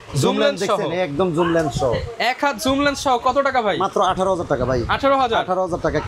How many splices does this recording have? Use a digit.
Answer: 0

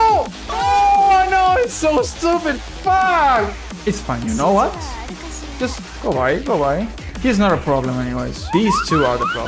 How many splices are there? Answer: 2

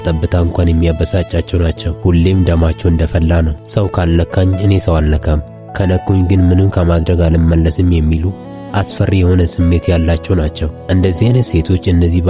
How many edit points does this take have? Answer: 0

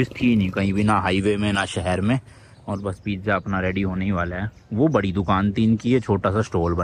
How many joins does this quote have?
0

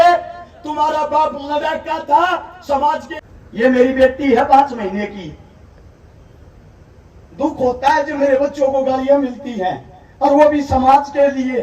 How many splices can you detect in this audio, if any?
1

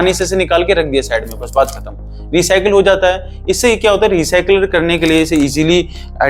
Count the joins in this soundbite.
0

